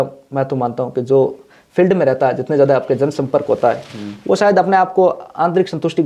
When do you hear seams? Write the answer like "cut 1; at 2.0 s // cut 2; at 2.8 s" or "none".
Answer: none